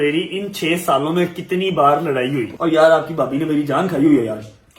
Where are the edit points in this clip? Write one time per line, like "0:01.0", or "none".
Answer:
0:02.5